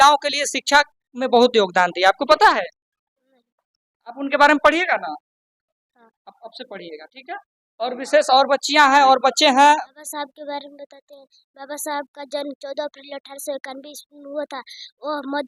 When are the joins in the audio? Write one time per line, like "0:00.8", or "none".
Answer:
0:09.8